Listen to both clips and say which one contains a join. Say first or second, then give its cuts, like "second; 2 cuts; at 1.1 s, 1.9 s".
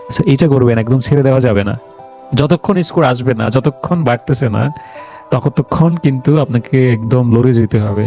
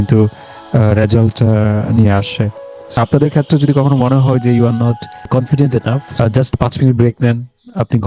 second; 3 cuts; at 3.0 s, 5.3 s, 6.2 s